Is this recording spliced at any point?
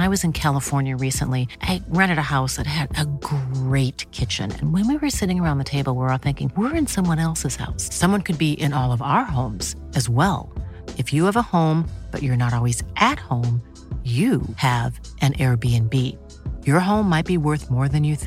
no; 0 cuts

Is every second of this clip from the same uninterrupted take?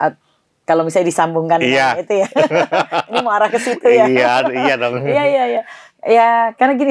yes; 0 cuts

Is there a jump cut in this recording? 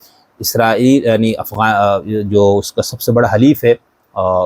no; 0 cuts

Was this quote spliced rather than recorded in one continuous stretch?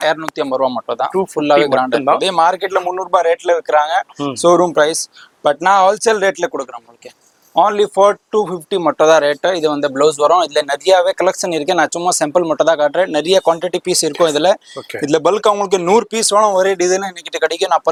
no; 0 cuts

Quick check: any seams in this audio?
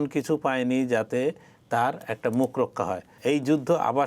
yes; 1 cut; at 3.1 s

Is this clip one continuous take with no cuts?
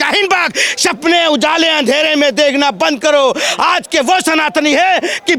yes; 0 cuts

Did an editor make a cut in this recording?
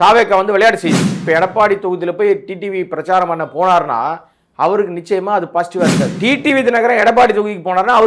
yes; 2 cuts; at 1.2 s, 6.1 s

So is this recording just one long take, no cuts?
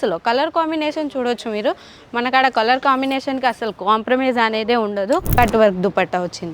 no; 1 cut; at 5.4 s

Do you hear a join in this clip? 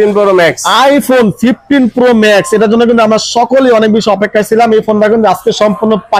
no; 0 cuts

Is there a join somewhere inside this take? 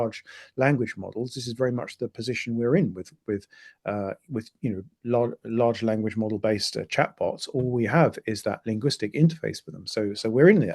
no; 0 cuts

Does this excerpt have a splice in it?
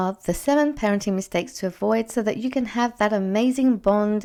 no; 0 cuts

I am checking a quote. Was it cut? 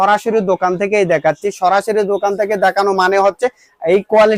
no; 0 cuts

